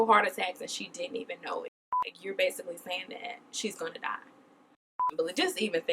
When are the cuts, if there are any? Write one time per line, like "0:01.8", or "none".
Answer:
0:02.1
0:05.0